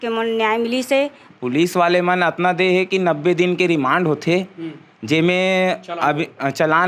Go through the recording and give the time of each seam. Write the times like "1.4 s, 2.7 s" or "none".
1.3 s